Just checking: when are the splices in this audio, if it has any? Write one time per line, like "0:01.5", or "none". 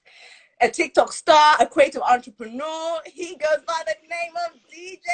none